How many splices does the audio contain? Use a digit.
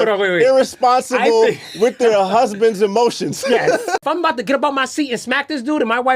1